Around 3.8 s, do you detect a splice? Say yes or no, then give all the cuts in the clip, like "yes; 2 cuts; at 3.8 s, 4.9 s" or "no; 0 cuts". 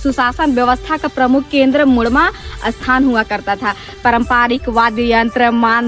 yes; 1 cut; at 3.8 s